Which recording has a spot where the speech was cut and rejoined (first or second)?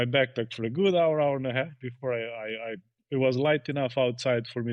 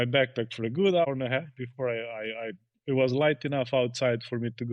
second